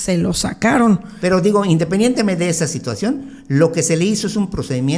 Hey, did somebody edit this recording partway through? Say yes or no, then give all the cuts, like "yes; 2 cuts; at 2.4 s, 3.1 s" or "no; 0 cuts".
yes; 1 cut; at 1.1 s